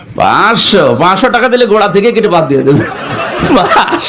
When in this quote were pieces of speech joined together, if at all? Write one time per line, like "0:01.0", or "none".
none

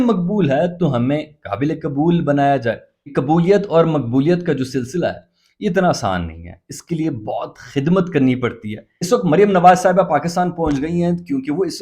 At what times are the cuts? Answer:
0:03.1
0:08.9

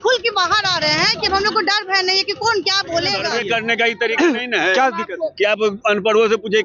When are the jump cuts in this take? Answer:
0:03.3

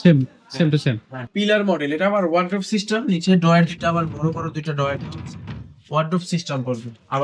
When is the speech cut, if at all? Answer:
0:01.3

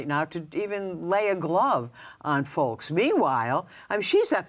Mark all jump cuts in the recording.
none

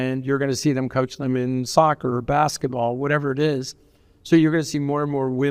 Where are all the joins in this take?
none

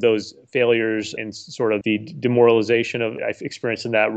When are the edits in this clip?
0:01.4
0:03.2

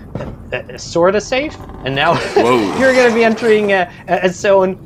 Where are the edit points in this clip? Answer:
none

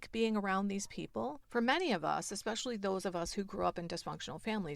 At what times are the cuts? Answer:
0:01.4

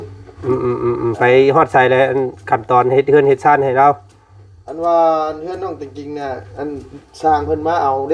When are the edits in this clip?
none

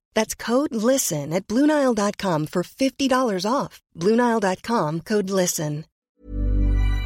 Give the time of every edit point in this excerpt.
0:05.9

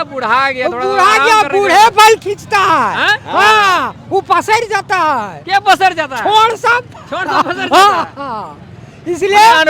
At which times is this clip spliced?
none

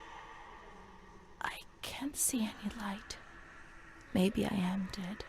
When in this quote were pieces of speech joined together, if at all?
0:01.3

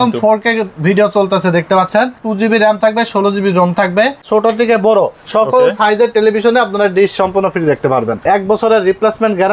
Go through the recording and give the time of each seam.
0:02.2
0:04.3
0:08.1

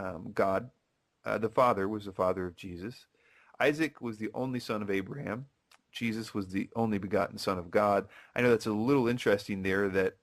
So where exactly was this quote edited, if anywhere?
0:04.6

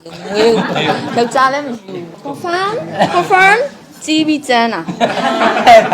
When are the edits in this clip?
0:02.2
0:03.8

